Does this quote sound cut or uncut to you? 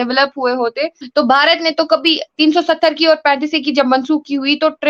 cut